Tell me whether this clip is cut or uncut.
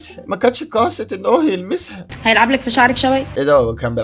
cut